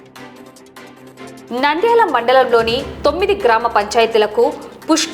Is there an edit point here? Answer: yes; 1 cut; at 1.2 s

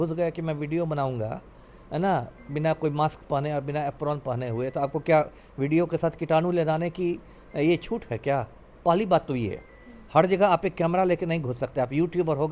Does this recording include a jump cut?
no; 0 cuts

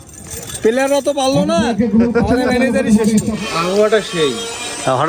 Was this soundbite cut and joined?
yes; 1 cut; at 3.3 s

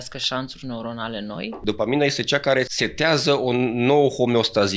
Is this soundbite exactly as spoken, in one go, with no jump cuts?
no; 2 cuts; at 1.6 s, 2.8 s

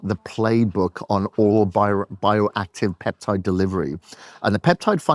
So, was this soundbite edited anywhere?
no; 0 cuts

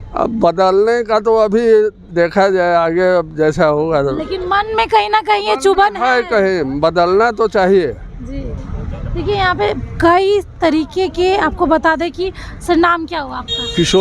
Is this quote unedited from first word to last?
yes; 0 cuts

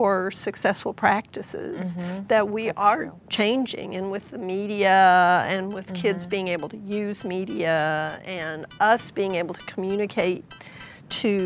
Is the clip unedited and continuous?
yes; 0 cuts

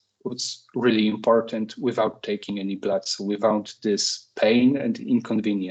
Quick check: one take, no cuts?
yes; 0 cuts

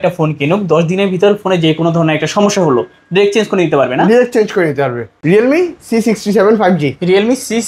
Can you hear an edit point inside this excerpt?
yes; 1 cut; at 5.1 s

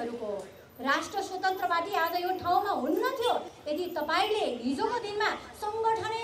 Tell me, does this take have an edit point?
no; 0 cuts

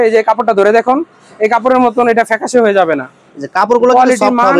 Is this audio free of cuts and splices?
yes; 0 cuts

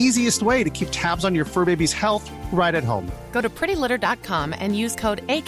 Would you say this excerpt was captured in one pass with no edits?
yes; 0 cuts

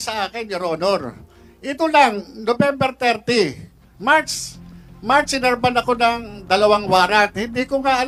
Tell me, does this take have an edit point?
no; 0 cuts

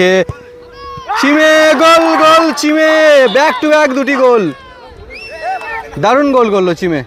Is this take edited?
no; 0 cuts

